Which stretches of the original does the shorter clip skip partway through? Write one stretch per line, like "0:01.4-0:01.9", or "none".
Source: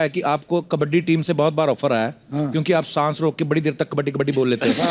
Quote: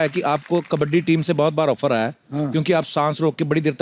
none